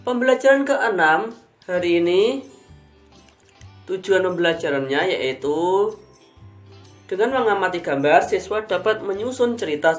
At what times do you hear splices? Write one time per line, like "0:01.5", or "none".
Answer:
none